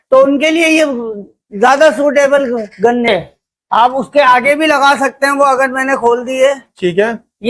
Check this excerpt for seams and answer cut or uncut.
cut